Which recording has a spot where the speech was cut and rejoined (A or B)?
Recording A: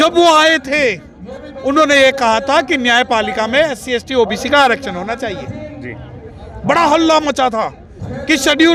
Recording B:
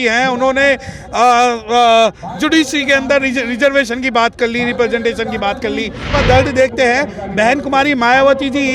B